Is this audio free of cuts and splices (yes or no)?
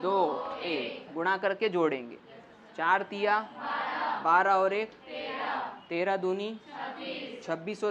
yes